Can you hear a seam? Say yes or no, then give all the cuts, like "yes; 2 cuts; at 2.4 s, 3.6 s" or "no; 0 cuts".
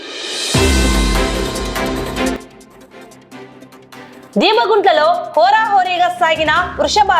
yes; 1 cut; at 4.3 s